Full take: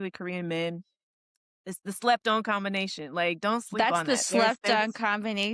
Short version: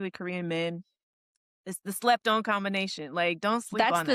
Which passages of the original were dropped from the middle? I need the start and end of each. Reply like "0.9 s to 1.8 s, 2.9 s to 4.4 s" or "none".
none